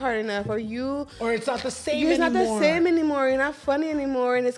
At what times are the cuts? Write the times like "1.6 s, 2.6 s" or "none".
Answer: none